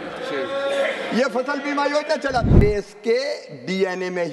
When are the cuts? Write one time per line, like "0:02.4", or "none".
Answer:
0:02.6